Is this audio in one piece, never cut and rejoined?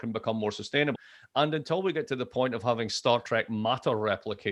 no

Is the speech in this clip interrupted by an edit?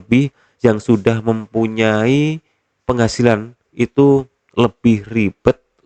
no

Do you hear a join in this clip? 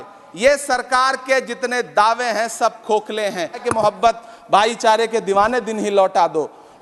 yes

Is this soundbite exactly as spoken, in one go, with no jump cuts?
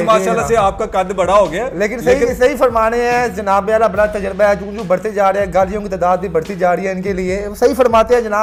yes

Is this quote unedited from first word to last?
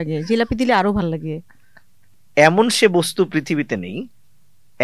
yes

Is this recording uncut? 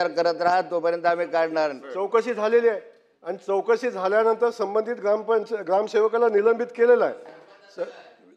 no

